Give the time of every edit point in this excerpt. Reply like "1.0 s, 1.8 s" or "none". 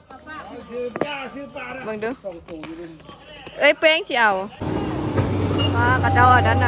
4.6 s